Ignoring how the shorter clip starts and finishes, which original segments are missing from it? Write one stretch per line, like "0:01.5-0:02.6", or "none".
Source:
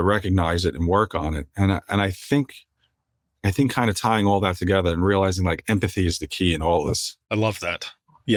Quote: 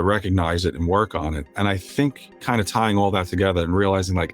0:01.5-0:01.8
0:02.8-0:03.7